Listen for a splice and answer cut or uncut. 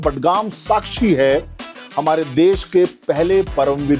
uncut